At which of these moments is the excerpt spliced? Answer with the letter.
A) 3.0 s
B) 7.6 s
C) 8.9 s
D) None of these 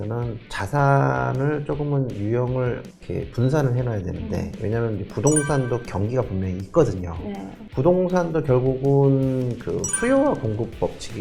B